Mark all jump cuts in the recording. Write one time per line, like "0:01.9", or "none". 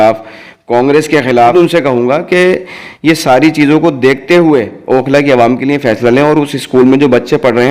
0:01.4